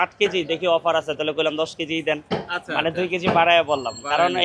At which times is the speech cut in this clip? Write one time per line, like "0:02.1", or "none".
0:02.2